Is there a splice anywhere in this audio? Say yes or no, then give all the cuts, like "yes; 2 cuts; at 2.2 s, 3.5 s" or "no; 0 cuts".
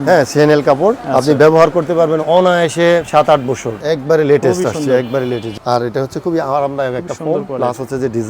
yes; 3 cuts; at 1.0 s, 3.7 s, 5.5 s